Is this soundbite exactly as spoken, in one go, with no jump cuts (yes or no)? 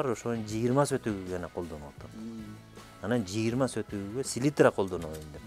yes